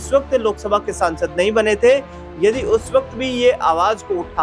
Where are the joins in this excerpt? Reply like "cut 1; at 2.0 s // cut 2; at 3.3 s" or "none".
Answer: none

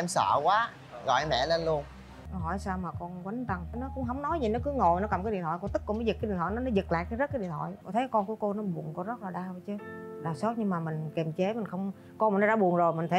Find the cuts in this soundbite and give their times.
cut 1; at 2.1 s // cut 2; at 7.7 s

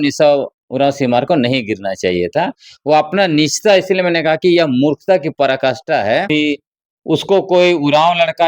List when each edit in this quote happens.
cut 1; at 6.3 s

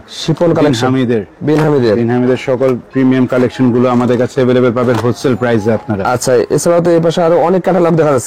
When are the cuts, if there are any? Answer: none

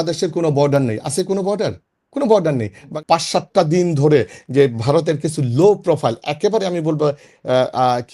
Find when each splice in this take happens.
cut 1; at 2.9 s

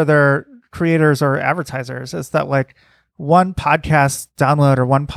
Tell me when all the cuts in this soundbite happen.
none

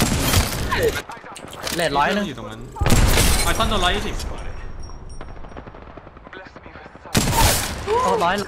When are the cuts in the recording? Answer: cut 1; at 1.0 s

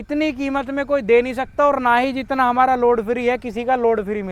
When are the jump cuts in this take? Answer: none

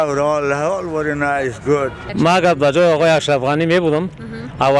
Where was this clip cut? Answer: cut 1; at 2.0 s

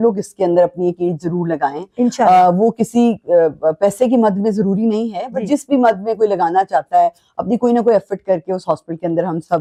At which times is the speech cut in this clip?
none

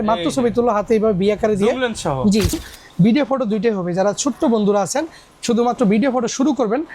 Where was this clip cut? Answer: cut 1; at 2.6 s

